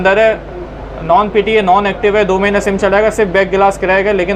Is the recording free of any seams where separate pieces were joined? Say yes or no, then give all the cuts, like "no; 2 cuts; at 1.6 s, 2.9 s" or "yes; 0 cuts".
yes; 0 cuts